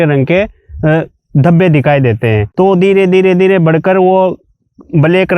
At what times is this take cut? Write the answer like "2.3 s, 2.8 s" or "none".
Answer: 2.4 s